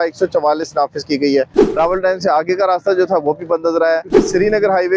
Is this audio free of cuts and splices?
no; 2 cuts; at 1.6 s, 4.1 s

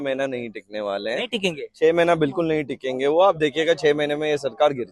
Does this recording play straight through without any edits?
yes; 0 cuts

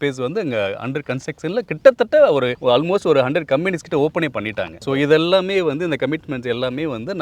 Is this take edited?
no; 0 cuts

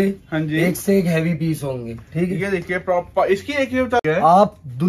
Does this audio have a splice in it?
yes; 1 cut; at 4.0 s

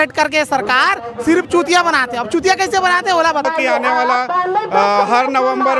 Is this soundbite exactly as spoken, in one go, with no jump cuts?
no; 1 cut; at 3.4 s

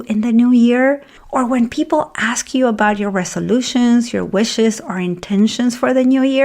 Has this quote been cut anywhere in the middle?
yes; 1 cut; at 1.1 s

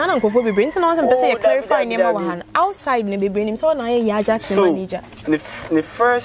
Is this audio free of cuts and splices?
yes; 0 cuts

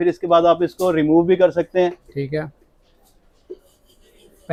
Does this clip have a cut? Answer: no; 0 cuts

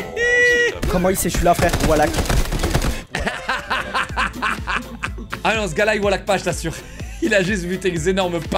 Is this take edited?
yes; 2 cuts; at 0.8 s, 5.4 s

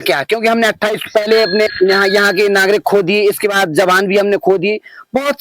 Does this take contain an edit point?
yes; 1 cut; at 1.7 s

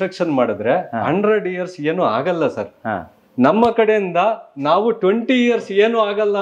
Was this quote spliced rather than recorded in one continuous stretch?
no; 0 cuts

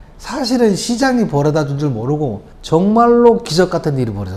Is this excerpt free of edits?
no; 1 cut; at 2.5 s

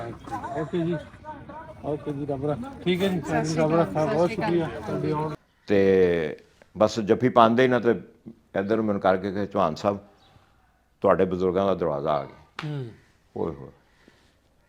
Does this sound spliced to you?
yes; 1 cut; at 5.3 s

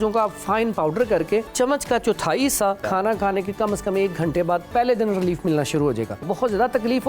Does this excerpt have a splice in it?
yes; 4 cuts; at 1.5 s, 2.8 s, 4.7 s, 6.2 s

